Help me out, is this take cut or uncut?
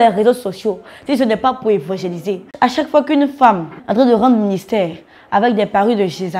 cut